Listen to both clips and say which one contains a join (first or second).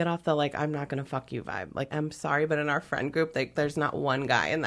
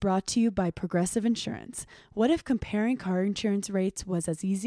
first